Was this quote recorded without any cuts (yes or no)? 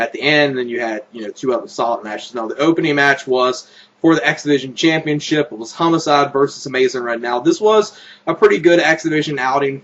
yes